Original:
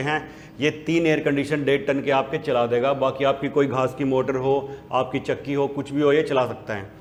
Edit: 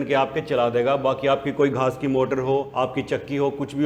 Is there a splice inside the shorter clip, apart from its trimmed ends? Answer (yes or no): yes